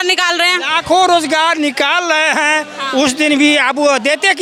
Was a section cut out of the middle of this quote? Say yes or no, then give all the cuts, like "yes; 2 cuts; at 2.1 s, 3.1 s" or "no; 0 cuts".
no; 0 cuts